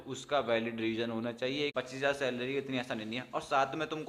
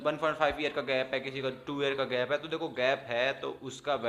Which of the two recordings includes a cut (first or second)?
first